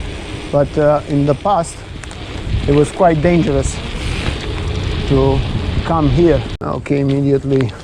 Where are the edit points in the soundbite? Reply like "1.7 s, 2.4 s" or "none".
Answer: 6.5 s